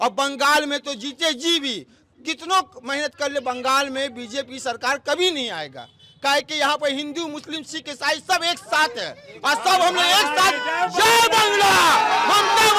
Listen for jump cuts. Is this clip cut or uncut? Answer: uncut